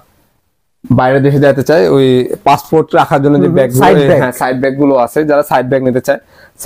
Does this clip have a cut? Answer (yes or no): no